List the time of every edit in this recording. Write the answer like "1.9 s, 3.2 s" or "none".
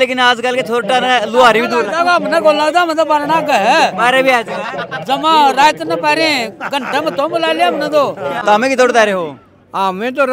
8.4 s